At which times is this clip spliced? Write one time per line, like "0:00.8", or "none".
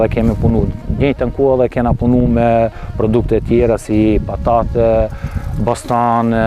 none